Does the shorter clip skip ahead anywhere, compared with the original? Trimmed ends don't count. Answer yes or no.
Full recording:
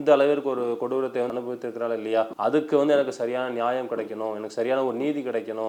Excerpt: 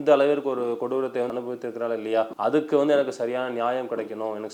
no